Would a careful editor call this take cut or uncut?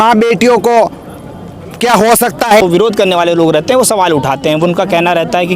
cut